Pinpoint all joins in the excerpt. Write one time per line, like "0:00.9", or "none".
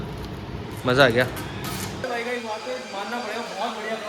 0:02.0